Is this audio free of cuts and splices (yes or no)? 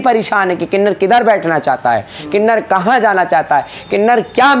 yes